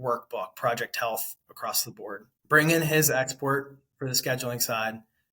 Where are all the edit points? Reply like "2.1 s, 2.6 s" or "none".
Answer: 2.4 s